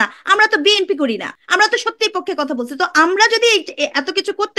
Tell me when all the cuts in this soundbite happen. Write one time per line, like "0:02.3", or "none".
0:01.3